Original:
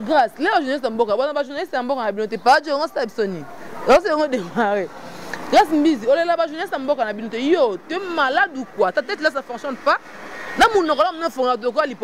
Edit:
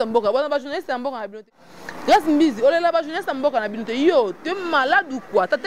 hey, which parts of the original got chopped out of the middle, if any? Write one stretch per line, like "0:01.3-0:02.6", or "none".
0:02.3-0:04.9